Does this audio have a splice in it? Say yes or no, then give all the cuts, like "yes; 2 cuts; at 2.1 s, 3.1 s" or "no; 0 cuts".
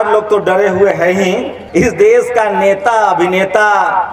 yes; 1 cut; at 1.6 s